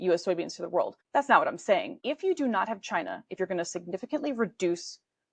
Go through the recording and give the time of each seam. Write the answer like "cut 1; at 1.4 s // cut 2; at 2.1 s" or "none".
cut 1; at 1.0 s // cut 2; at 2.0 s